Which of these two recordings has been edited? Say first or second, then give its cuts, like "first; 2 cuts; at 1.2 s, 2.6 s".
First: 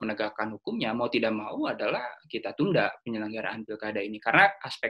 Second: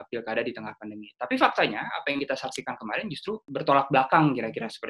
second; 1 cut; at 3.4 s